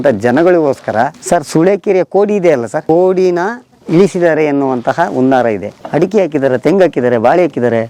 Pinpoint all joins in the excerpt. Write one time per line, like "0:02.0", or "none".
0:01.2
0:02.8
0:05.9